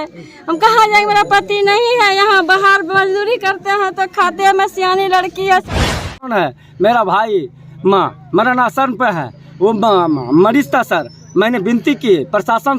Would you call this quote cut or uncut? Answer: cut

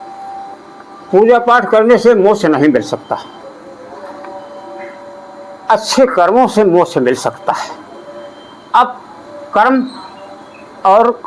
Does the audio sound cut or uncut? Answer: uncut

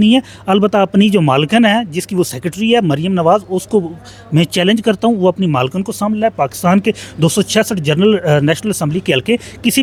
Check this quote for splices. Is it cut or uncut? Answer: uncut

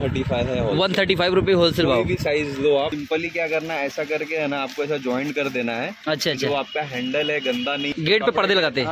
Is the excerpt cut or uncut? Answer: cut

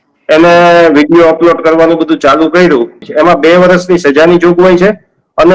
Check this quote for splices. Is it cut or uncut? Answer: cut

